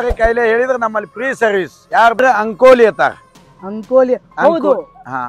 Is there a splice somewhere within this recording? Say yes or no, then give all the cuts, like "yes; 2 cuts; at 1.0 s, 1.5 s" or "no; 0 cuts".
yes; 1 cut; at 2.2 s